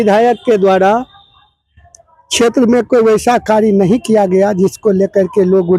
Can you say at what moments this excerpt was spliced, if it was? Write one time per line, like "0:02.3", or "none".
none